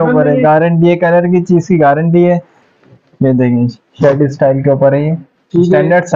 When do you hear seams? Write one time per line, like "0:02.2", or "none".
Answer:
0:02.5